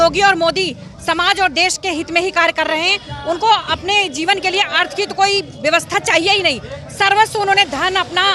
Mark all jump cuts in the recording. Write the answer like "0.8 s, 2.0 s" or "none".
none

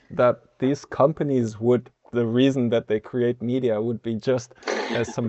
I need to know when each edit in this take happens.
2.0 s

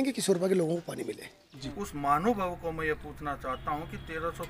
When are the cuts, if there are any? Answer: 1.8 s

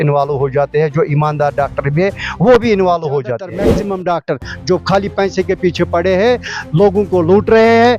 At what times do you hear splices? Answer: 3.8 s

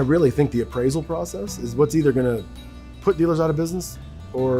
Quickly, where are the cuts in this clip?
1.3 s

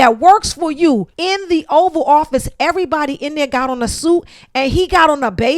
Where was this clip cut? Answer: 1.1 s

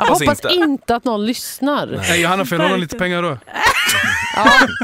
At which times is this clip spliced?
none

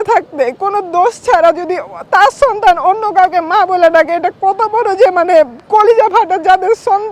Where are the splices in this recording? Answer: none

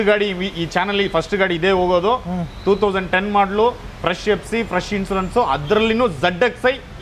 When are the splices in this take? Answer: none

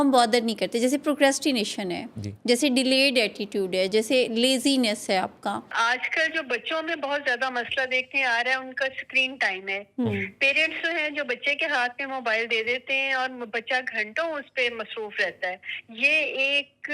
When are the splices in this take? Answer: 5.7 s

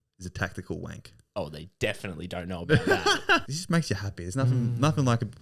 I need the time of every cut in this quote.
3.4 s

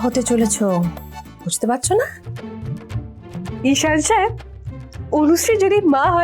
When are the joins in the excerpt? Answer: 3.6 s

